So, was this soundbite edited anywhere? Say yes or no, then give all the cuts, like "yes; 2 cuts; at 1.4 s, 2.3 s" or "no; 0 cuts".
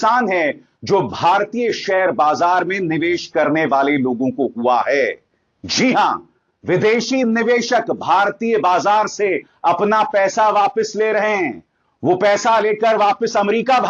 no; 0 cuts